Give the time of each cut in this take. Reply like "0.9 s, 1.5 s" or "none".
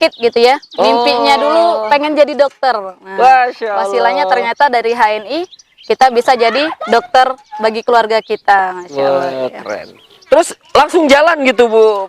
10.2 s